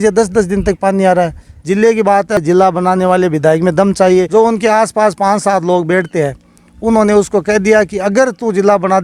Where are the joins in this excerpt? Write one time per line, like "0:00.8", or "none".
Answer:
0:01.5
0:02.4
0:04.3